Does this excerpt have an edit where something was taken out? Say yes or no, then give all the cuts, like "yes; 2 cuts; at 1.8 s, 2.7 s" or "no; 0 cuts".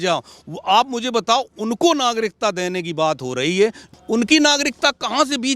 yes; 1 cut; at 3.9 s